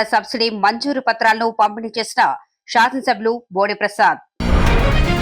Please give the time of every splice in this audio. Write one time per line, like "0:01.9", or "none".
0:04.3

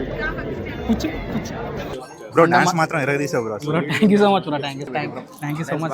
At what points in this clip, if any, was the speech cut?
0:02.0
0:04.9

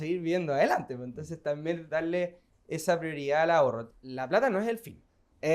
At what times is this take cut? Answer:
0:01.8
0:03.9

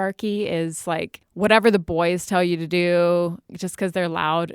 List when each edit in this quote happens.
0:01.2

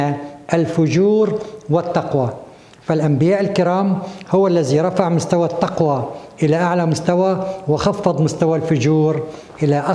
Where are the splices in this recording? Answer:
none

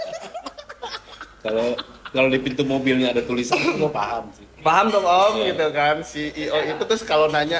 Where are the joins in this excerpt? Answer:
none

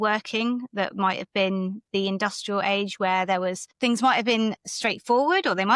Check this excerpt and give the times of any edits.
none

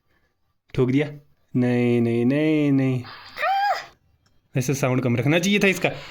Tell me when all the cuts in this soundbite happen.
0:03.9

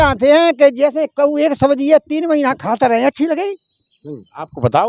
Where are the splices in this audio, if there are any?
none

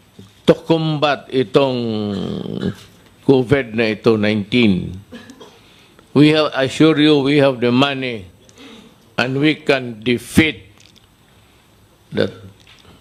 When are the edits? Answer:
none

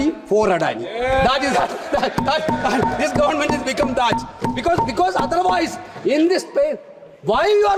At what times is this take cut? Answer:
none

